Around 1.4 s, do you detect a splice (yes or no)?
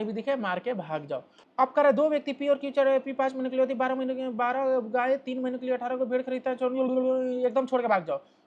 yes